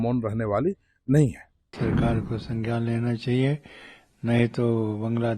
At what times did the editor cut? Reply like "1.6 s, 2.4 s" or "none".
1.8 s